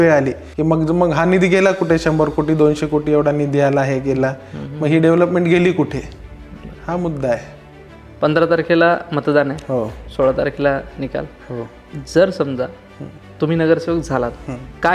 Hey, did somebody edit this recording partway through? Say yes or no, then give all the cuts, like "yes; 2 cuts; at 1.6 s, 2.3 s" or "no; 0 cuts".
no; 0 cuts